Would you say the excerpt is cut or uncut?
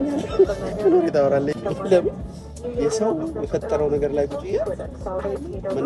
cut